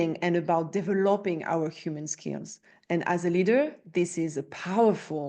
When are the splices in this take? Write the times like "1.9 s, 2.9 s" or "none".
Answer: none